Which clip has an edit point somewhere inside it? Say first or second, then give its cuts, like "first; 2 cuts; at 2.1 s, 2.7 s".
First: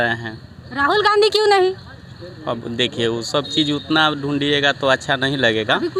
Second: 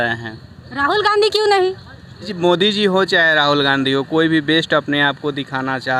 second; 1 cut; at 2.3 s